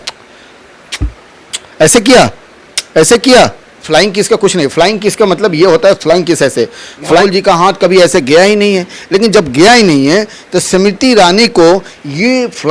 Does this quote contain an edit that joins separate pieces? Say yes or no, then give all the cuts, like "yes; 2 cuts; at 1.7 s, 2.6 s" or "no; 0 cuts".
yes; 2 cuts; at 3.8 s, 7.2 s